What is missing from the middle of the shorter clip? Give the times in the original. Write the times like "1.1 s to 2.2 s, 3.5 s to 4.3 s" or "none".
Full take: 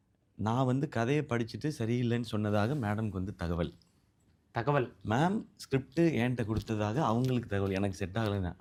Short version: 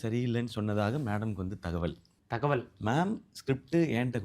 3.9 s to 4.3 s